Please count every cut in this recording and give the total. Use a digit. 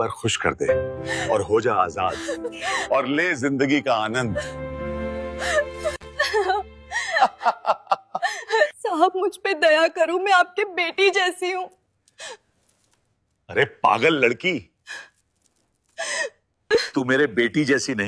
1